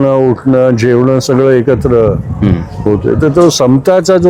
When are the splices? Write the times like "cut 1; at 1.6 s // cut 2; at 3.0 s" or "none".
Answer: none